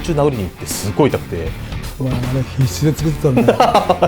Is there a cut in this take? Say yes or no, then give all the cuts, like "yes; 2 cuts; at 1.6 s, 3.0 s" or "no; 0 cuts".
yes; 1 cut; at 1.7 s